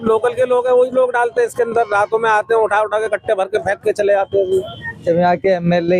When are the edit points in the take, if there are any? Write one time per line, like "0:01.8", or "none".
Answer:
0:04.7